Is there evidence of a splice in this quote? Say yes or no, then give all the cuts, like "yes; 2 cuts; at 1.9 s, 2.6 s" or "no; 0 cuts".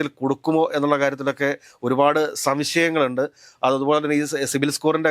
no; 0 cuts